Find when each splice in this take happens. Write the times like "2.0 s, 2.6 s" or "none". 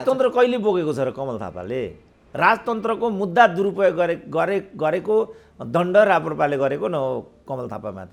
none

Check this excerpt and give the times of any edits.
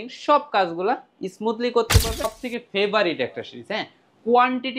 2.2 s

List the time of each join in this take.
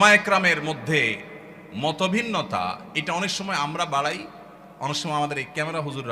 none

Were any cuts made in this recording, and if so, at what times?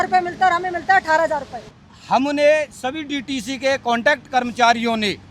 1.7 s

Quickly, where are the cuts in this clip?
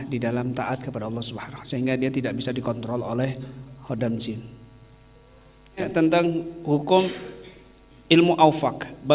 5.9 s

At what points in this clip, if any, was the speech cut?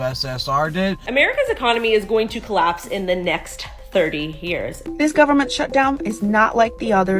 1.0 s, 4.8 s

